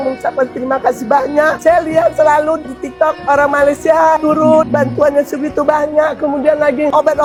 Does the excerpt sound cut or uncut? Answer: uncut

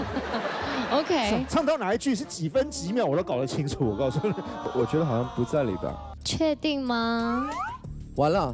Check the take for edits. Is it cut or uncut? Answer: cut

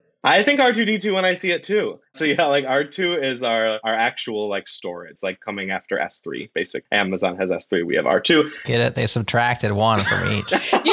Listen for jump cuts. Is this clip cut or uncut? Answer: cut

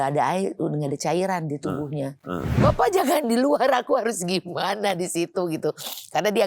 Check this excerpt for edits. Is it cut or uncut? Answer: cut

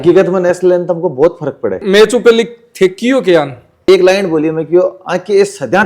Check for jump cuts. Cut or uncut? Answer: cut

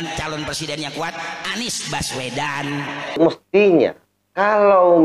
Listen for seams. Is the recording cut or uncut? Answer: cut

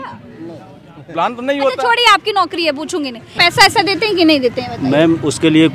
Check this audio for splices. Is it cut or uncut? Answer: cut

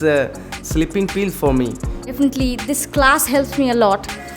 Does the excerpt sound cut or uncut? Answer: cut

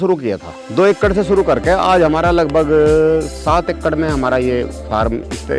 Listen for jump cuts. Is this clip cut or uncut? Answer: uncut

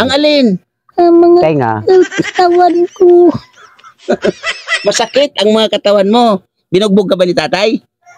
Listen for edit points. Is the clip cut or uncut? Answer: uncut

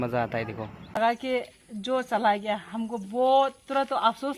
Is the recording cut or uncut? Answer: cut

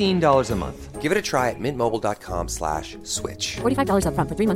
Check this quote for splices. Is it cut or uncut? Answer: uncut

